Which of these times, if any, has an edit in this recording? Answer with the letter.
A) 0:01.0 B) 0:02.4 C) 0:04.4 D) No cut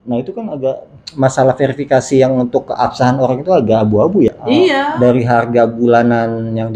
C